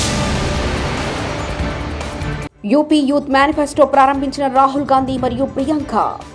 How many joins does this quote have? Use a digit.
1